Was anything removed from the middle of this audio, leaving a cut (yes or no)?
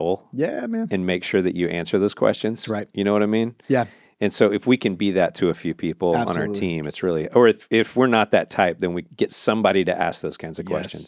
no